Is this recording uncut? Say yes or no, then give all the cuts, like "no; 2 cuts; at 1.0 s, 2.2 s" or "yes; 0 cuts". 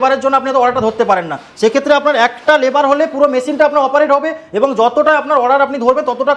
yes; 0 cuts